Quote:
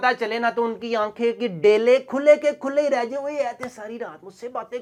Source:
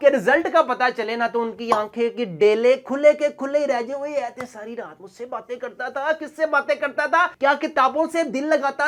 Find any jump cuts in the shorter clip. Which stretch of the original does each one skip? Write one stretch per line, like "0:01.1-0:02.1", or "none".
none